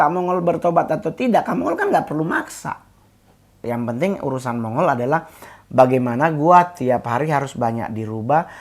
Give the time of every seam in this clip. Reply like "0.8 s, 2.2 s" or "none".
3.6 s